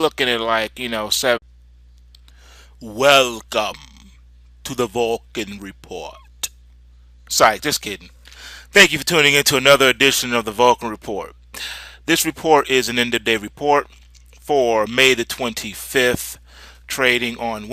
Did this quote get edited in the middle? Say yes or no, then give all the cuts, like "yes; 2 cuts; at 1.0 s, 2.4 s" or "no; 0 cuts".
no; 0 cuts